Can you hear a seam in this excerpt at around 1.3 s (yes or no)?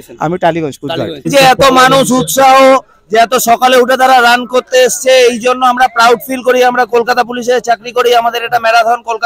yes